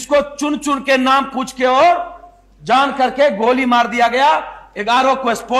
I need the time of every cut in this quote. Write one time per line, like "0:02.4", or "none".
none